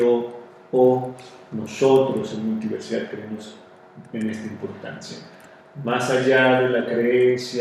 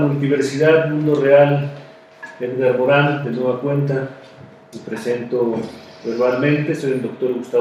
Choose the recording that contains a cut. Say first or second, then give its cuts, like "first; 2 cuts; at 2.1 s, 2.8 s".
first; 1 cut; at 4.8 s